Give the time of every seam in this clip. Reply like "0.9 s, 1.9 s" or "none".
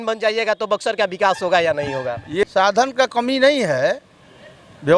2.4 s